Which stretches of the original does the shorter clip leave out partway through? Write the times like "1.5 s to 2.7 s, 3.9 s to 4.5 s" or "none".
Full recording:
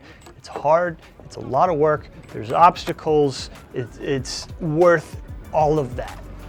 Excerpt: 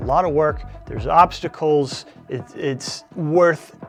none

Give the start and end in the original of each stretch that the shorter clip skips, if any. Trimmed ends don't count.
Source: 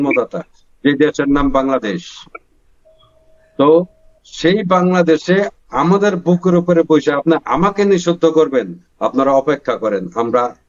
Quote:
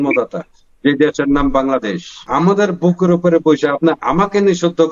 2.2 s to 5.6 s

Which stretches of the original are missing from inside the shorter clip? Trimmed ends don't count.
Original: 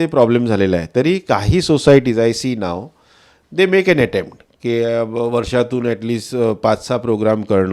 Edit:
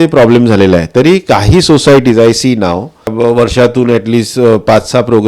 3.1 s to 5.1 s

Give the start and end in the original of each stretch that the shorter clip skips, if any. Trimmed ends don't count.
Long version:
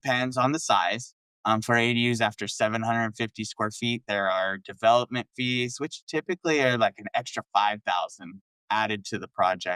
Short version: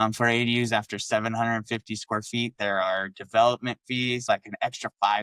5.7 s to 6.8 s

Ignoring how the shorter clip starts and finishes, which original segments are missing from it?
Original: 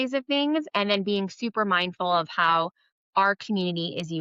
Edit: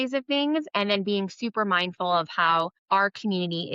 2.8 s to 3.0 s

